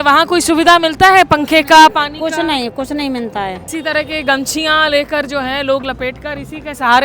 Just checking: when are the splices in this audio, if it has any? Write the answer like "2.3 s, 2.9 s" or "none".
3.6 s